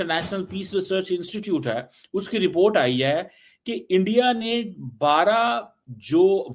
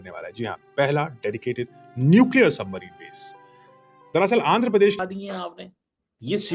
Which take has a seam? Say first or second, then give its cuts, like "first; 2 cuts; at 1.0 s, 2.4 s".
second; 1 cut; at 5.0 s